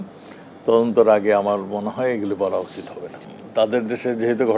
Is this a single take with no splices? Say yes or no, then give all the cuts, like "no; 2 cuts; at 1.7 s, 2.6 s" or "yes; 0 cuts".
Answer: no; 1 cut; at 3.2 s